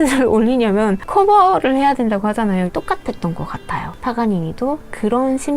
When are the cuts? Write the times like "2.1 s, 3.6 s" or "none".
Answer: 2.7 s